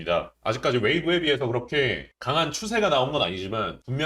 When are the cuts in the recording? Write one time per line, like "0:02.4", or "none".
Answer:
none